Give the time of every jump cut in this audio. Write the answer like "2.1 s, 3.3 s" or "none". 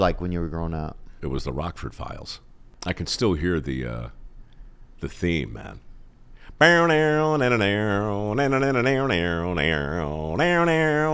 1.2 s, 2.6 s

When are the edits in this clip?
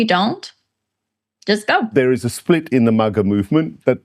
1.9 s

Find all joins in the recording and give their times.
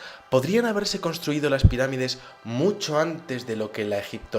1.5 s

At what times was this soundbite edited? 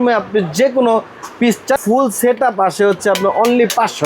1.8 s

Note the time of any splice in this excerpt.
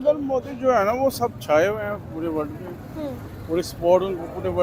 none

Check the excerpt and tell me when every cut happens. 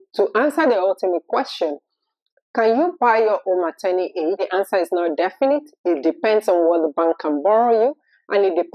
4.4 s

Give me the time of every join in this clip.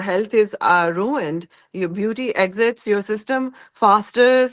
none

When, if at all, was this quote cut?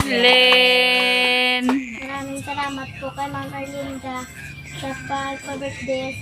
2.0 s

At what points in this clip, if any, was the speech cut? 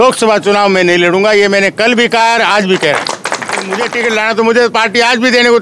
3.9 s

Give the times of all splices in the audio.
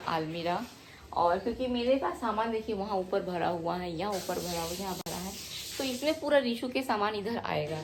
none

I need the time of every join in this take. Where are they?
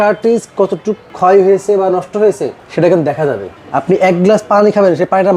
1.1 s, 3.5 s

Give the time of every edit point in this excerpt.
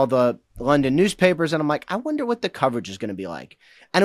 none

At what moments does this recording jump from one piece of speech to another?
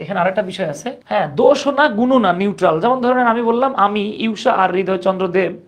1.0 s

